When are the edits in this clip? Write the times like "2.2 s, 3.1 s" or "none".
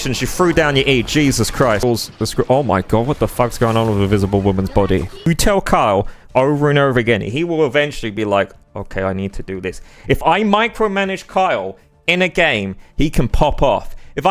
1.8 s, 5.3 s